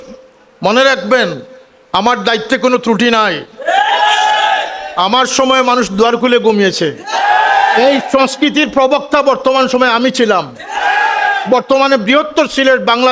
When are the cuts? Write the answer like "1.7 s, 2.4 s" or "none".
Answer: none